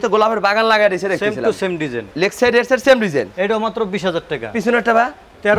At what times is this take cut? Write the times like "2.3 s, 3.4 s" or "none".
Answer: none